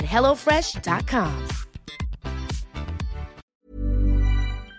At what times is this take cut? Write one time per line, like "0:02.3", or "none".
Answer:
0:03.5